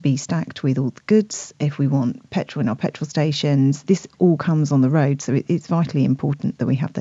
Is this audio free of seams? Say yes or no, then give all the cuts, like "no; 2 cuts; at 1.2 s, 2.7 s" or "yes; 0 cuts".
no; 1 cut; at 3.8 s